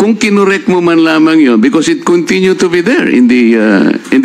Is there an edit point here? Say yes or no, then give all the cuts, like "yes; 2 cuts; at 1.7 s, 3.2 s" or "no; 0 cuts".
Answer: no; 0 cuts